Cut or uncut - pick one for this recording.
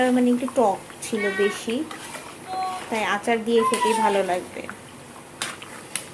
uncut